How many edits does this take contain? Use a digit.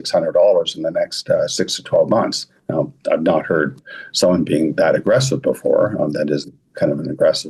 0